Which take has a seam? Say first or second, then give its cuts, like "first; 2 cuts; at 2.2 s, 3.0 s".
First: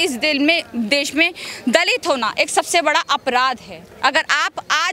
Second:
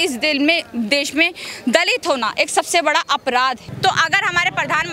second; 1 cut; at 3.7 s